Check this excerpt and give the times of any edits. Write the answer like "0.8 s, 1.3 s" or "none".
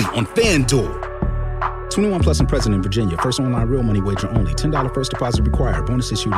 none